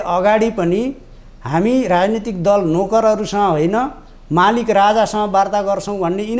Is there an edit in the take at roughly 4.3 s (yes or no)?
no